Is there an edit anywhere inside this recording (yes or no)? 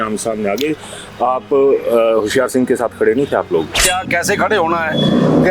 yes